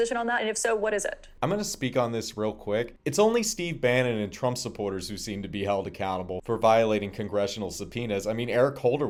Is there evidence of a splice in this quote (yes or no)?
no